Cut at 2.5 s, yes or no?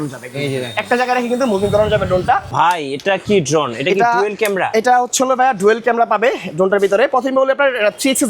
yes